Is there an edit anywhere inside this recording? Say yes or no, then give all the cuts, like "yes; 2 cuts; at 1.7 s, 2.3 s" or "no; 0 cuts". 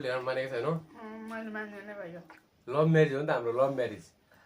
yes; 1 cut; at 2.4 s